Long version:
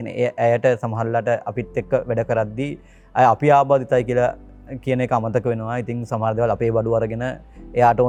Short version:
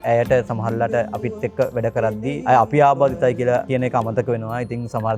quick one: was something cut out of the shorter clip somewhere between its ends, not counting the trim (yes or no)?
yes